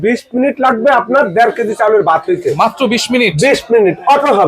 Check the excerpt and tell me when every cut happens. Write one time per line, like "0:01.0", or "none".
none